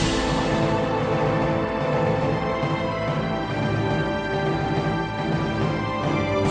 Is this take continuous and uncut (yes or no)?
yes